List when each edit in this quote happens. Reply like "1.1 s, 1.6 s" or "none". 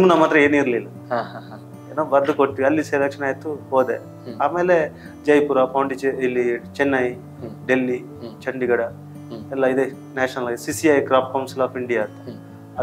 none